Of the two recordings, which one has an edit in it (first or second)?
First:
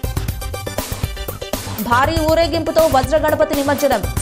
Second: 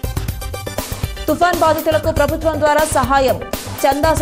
second